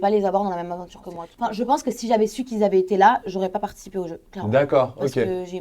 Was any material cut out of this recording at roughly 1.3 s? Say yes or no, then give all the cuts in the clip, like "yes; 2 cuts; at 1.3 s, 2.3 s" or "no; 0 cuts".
yes; 1 cut; at 1.3 s